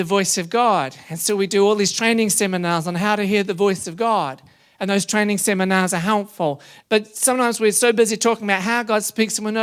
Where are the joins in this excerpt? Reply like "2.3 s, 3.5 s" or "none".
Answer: 6.7 s

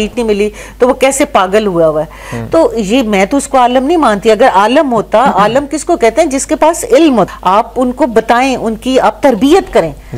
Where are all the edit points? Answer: 7.3 s

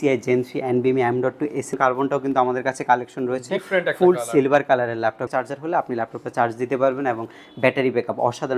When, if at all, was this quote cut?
1.7 s, 5.3 s

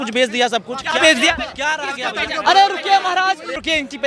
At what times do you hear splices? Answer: none

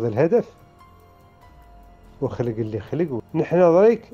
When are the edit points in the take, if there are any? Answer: 3.2 s

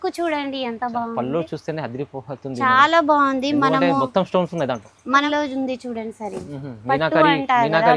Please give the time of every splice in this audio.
5.2 s

